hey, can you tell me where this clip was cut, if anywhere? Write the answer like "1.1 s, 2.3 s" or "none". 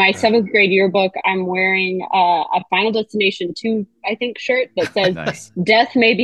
none